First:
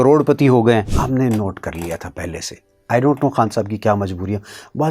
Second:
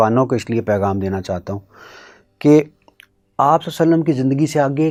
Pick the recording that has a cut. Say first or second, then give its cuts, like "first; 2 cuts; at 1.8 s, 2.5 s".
first; 1 cut; at 0.9 s